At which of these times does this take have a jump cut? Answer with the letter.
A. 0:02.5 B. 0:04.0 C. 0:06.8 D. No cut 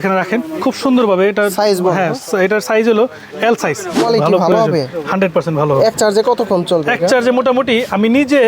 B